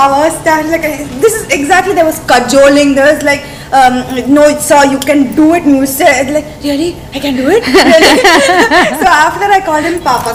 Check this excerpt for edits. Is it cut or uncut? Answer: uncut